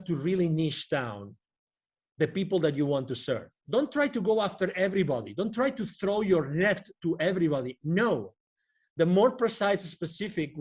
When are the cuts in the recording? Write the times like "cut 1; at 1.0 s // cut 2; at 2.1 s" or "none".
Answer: cut 1; at 3.5 s